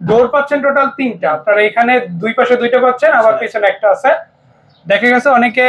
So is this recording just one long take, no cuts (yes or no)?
yes